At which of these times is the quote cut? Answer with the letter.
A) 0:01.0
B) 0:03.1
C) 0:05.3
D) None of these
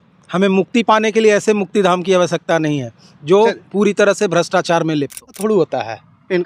C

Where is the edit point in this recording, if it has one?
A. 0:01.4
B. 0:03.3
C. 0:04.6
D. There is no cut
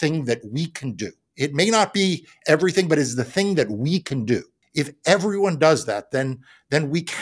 C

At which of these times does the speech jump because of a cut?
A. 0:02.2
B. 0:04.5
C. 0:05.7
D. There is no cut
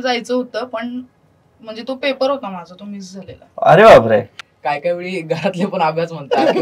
B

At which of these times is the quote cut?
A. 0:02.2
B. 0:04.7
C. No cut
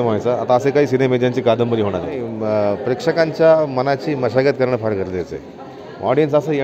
A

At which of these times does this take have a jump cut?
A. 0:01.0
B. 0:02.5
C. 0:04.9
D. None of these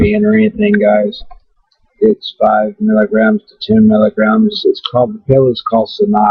A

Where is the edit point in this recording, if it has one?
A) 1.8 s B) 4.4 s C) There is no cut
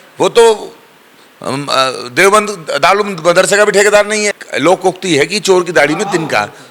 B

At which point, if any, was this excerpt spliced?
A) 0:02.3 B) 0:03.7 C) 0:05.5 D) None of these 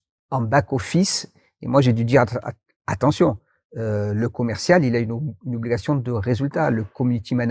D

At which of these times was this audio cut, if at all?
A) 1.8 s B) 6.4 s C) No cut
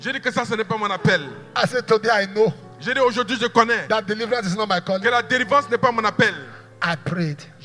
C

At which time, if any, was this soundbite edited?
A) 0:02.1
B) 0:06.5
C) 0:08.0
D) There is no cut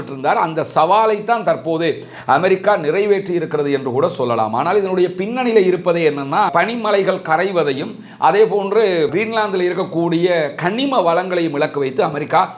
B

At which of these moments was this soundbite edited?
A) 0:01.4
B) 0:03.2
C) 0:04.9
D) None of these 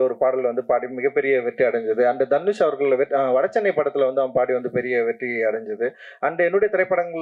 D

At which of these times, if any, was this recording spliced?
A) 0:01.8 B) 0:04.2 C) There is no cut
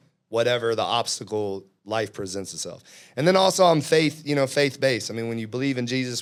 C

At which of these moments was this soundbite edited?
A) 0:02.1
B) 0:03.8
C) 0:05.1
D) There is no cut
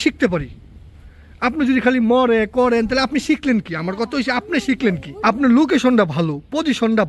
C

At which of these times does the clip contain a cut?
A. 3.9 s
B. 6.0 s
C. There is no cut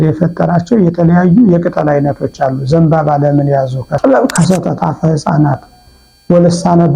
A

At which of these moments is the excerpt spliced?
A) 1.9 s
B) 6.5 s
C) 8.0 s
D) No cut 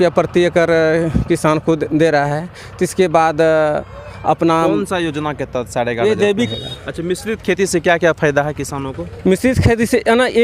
B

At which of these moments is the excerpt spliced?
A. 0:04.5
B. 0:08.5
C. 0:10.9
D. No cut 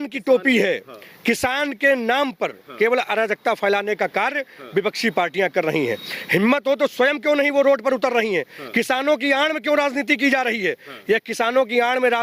D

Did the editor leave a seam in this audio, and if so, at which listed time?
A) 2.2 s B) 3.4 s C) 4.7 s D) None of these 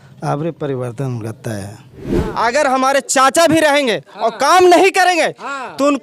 A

